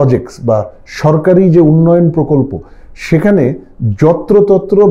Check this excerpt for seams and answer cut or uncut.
uncut